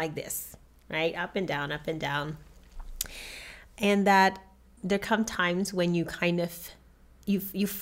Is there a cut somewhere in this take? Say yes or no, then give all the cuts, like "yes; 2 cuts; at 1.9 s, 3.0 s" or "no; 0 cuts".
no; 0 cuts